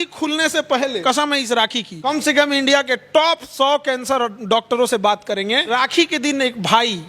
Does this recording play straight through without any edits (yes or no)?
no